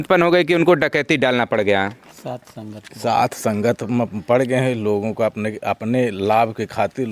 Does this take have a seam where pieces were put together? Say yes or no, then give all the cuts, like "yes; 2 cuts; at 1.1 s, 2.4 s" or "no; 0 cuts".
no; 0 cuts